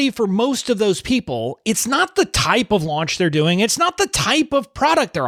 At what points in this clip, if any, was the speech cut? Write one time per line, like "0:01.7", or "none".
none